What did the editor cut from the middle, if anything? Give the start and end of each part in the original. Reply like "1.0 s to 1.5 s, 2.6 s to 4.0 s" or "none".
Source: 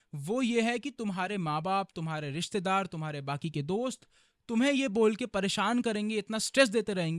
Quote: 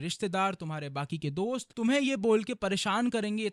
4.0 s to 4.4 s